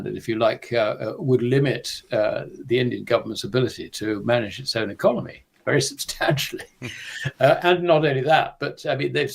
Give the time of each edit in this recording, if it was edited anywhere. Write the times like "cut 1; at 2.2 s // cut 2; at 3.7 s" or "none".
none